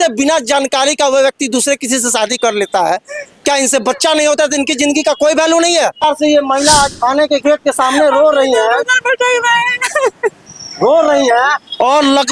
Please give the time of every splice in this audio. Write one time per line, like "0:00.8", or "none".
0:06.0